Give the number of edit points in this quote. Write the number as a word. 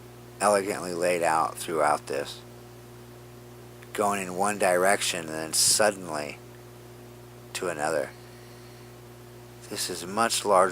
one